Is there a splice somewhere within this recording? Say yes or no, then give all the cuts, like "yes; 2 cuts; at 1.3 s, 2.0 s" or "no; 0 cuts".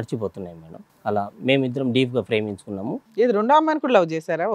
no; 0 cuts